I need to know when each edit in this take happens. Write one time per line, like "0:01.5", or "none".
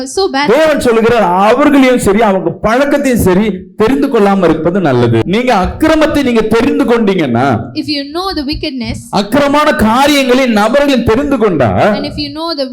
0:05.3